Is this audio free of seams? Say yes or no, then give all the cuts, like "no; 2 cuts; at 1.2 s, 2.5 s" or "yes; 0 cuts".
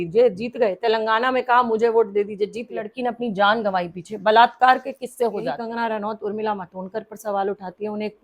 no; 2 cuts; at 2.9 s, 5.6 s